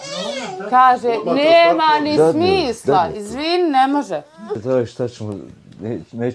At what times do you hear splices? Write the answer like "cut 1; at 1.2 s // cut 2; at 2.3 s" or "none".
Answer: cut 1; at 4.6 s